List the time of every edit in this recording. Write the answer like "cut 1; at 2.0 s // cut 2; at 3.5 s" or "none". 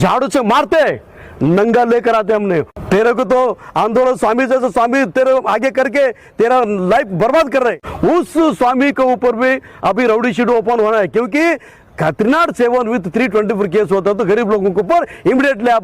cut 1; at 2.7 s // cut 2; at 7.9 s